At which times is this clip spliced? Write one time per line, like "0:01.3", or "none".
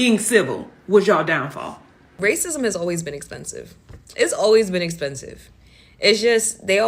0:02.1